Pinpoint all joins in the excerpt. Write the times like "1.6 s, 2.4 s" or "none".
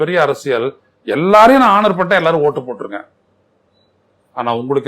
none